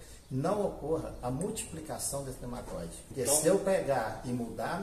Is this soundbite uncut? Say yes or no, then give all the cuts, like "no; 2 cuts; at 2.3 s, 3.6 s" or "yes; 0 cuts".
no; 1 cut; at 3.1 s